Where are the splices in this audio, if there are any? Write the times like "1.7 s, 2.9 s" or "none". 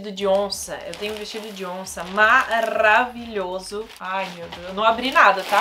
none